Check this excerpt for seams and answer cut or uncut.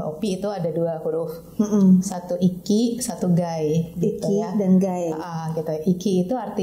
uncut